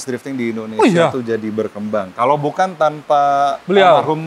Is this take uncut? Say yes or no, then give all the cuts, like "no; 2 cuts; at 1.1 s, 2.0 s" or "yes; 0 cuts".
yes; 0 cuts